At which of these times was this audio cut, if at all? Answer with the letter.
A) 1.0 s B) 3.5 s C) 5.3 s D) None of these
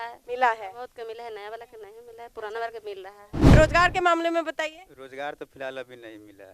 B